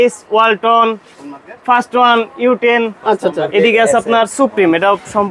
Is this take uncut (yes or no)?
yes